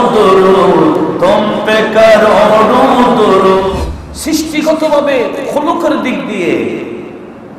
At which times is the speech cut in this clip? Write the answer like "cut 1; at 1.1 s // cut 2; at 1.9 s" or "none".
cut 1; at 3.7 s